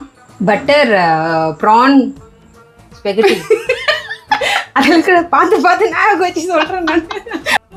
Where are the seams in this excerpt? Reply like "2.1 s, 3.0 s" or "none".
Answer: none